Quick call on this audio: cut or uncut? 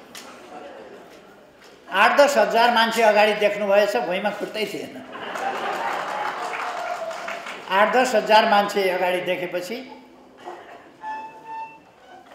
uncut